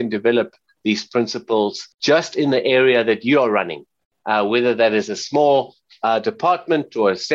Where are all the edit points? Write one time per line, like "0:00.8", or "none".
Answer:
0:01.9